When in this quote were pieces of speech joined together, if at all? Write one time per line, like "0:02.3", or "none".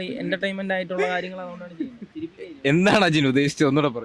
none